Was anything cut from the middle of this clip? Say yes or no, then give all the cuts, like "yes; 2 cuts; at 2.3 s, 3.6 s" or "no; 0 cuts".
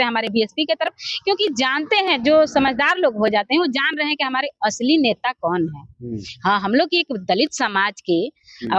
no; 0 cuts